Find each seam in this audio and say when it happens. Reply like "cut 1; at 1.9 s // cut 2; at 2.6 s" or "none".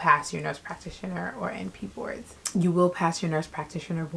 none